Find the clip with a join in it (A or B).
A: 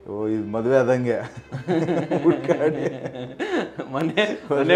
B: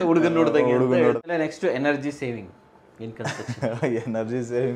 B